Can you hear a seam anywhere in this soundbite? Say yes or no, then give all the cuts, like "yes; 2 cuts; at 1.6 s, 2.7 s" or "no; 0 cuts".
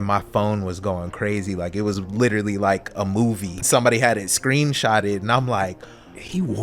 yes; 1 cut; at 3.6 s